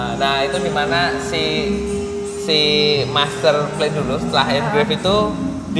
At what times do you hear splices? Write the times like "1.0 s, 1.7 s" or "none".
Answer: none